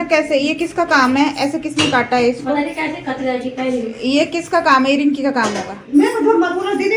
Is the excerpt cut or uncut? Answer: uncut